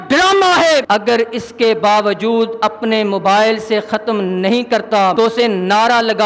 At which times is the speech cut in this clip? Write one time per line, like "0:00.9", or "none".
0:00.8
0:05.1